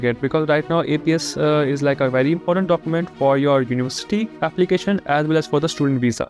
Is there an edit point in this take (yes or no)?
no